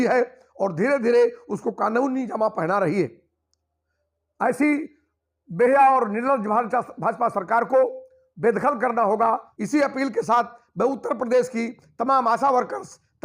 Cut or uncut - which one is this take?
cut